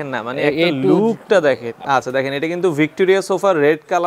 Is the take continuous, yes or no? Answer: no